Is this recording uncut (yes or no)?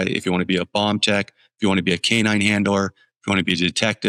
yes